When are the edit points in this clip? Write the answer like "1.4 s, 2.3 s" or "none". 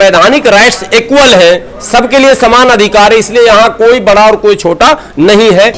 none